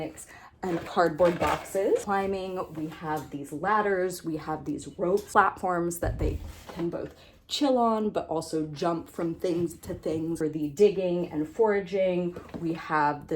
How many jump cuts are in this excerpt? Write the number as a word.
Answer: four